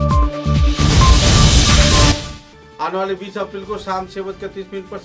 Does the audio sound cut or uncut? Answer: cut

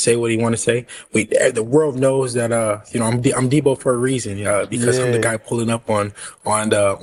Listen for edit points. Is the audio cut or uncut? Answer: uncut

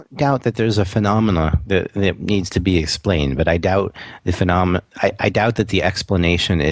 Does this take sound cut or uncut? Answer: uncut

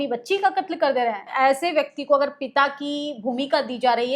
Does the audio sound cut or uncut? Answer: cut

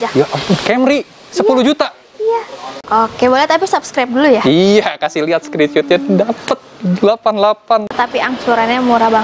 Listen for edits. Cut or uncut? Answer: cut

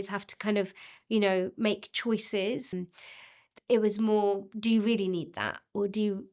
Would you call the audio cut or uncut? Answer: cut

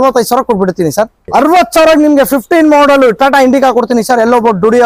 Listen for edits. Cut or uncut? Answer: cut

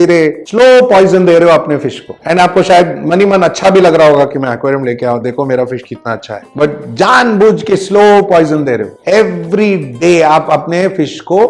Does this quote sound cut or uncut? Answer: uncut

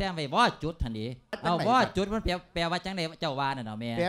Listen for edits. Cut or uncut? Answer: cut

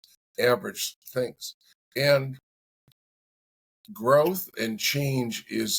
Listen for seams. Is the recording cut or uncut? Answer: uncut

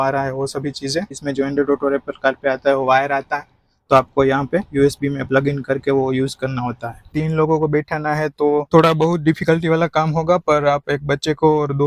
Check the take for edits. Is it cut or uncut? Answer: cut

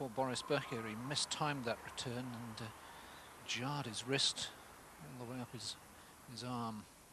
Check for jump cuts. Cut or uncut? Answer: cut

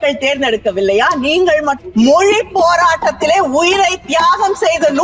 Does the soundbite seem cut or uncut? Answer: cut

